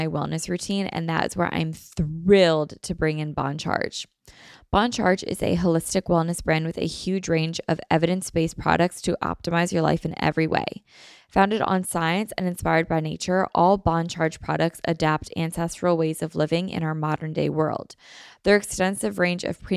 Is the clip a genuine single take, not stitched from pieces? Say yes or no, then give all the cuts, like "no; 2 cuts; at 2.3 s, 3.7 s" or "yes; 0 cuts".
yes; 0 cuts